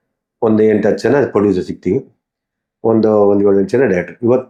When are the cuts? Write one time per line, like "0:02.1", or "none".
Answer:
none